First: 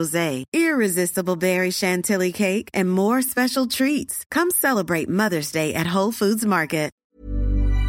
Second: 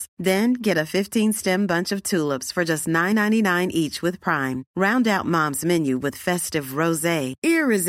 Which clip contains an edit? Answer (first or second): first